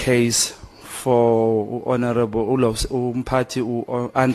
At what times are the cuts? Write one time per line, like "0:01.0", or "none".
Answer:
none